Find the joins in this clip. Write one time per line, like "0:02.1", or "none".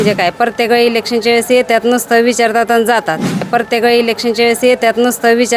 none